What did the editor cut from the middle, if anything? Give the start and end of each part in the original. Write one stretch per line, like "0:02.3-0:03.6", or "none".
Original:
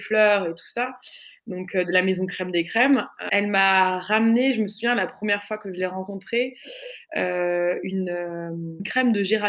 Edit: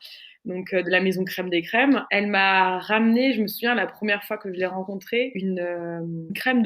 0:03.1-0:03.3
0:06.6-0:07.8